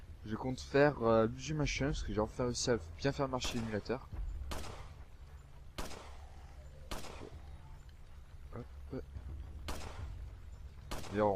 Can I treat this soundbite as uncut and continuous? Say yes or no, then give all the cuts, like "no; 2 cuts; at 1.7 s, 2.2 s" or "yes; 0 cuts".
no; 1 cut; at 6.8 s